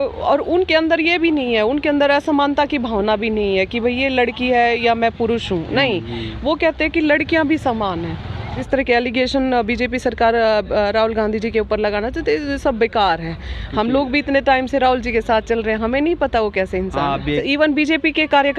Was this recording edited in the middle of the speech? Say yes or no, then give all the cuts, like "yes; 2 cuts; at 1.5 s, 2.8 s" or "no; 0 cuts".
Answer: yes; 2 cuts; at 8.6 s, 17.4 s